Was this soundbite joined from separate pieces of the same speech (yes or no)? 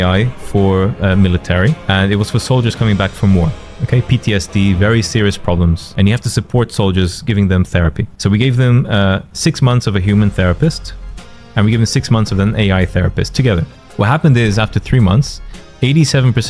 yes